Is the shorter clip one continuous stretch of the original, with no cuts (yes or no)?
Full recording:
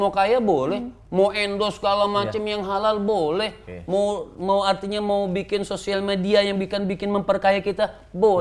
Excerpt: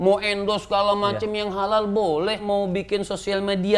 no